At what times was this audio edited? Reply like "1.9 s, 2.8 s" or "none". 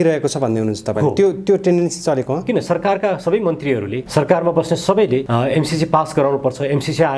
4.0 s, 5.3 s

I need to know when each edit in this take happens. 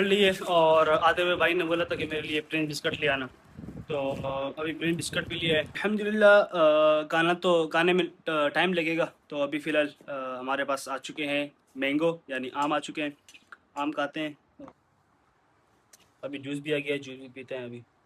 5.7 s, 14.5 s

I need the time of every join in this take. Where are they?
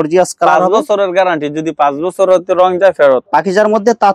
3.2 s

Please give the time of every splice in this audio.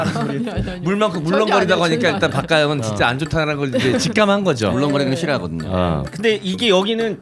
6.1 s

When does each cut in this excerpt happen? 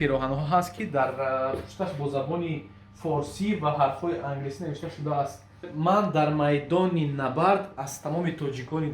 5.7 s

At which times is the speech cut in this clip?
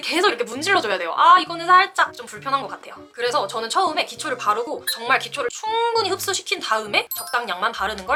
none

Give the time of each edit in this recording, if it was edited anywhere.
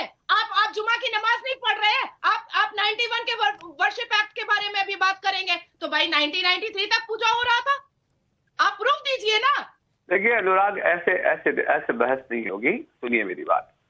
2.1 s, 9.7 s

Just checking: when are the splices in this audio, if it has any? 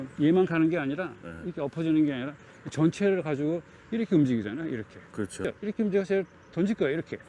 5.4 s

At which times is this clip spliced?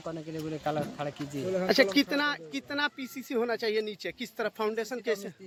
none

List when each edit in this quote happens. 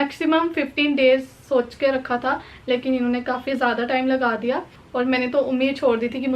4.8 s

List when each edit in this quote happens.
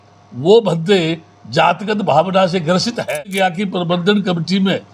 3.1 s

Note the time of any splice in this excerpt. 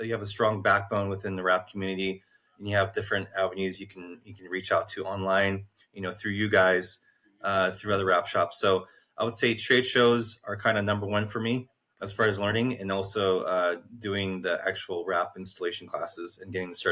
none

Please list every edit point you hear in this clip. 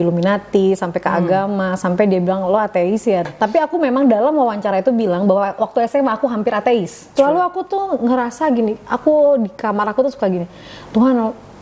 3.3 s, 7.0 s

